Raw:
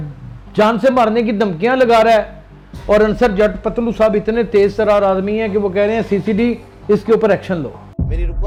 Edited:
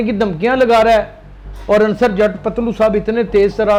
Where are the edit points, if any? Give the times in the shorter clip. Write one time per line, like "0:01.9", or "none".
none